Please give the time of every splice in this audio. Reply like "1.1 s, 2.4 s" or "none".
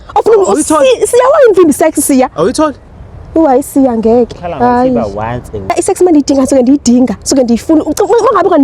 5.7 s